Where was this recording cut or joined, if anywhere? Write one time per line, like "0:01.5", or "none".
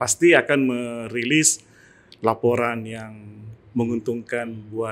none